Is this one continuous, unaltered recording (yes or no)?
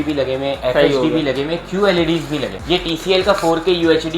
no